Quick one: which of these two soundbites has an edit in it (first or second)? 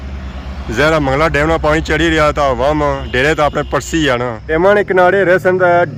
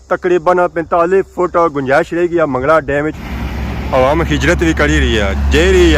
second